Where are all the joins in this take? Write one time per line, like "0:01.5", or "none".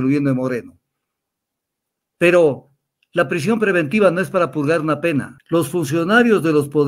0:05.4

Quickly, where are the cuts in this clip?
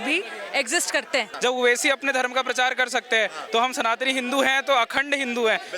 0:01.3

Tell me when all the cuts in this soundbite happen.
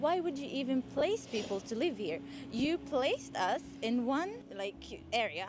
none

